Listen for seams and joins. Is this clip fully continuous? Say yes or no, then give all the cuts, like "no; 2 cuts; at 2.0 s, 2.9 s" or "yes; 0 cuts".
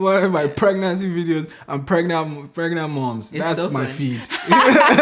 yes; 0 cuts